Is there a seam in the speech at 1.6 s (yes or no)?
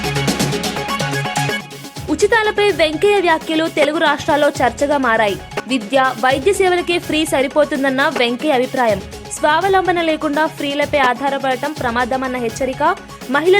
yes